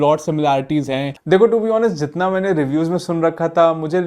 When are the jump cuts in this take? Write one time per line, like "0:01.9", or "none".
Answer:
0:01.1